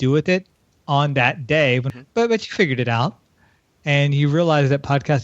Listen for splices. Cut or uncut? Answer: cut